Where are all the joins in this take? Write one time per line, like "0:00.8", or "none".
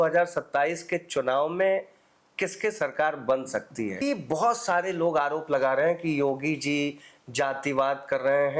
0:04.0